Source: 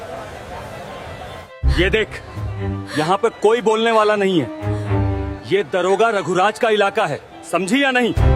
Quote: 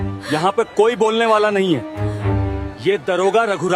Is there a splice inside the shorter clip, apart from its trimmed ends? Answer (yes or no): no